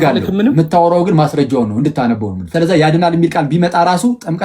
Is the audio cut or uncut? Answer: cut